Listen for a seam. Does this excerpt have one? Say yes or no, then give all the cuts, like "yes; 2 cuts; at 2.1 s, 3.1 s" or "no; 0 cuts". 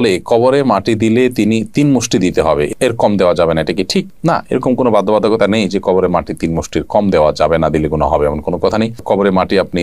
no; 0 cuts